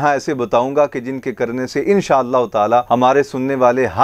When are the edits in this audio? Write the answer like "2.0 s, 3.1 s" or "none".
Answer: 2.9 s